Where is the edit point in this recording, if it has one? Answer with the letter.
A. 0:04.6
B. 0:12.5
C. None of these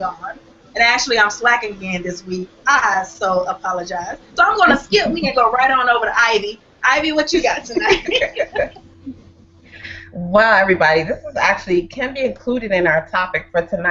A